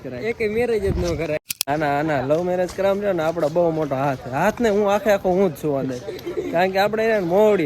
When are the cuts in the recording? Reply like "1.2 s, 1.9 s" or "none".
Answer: 1.7 s